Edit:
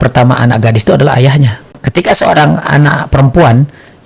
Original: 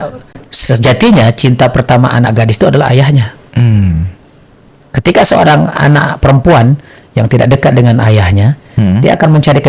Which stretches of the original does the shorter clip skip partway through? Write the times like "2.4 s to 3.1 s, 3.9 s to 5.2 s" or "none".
3.4 s to 4.7 s